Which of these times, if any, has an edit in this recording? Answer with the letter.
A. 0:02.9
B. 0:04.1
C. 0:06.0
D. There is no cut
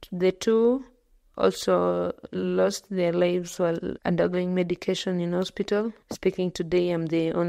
C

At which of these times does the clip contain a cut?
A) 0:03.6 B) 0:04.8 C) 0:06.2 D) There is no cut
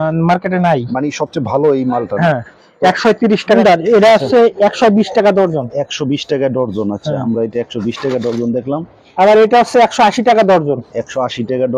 A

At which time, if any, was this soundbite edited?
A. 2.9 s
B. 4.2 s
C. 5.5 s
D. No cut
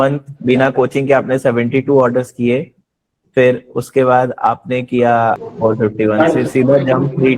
C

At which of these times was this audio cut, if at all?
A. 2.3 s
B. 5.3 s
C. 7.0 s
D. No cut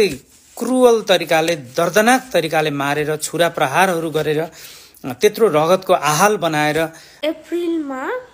C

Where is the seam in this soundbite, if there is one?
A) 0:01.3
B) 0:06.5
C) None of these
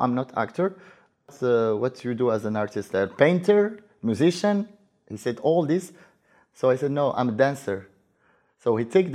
A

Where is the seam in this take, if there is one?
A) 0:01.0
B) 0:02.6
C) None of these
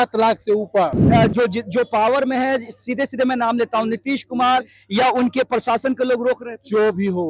A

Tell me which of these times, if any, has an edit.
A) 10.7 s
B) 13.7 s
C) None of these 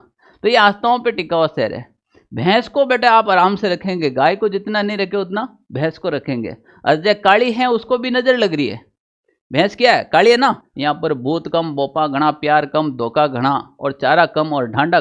A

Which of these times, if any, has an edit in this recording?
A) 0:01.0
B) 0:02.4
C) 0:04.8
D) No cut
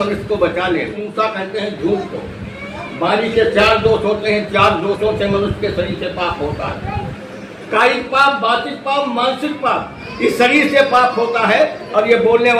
A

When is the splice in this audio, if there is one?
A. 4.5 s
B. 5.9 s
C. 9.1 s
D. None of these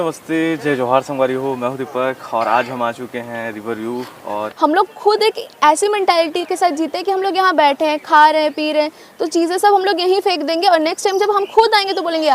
A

